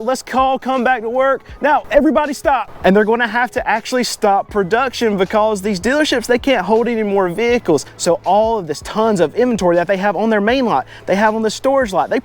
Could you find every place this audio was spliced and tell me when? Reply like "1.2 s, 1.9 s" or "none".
7.9 s